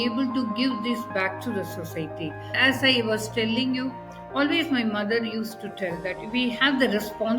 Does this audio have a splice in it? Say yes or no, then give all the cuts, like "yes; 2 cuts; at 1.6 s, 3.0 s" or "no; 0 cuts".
yes; 1 cut; at 2.6 s